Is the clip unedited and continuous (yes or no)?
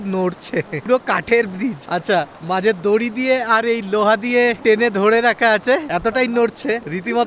yes